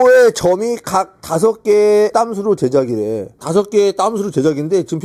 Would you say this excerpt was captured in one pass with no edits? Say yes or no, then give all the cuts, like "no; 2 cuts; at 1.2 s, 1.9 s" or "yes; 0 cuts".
yes; 0 cuts